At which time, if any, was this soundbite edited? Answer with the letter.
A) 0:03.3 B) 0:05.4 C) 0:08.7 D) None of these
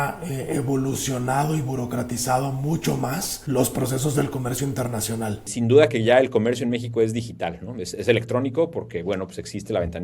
B